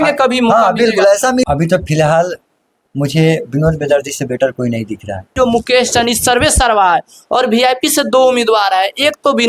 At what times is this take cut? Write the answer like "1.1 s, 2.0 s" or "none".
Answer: 1.4 s, 5.3 s